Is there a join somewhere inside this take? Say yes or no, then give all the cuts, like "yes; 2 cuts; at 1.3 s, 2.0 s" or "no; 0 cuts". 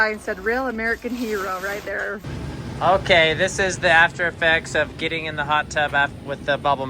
yes; 1 cut; at 2.3 s